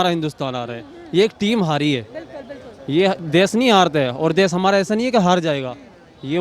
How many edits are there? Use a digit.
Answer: 0